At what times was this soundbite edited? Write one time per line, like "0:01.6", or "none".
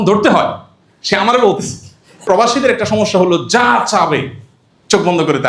0:02.2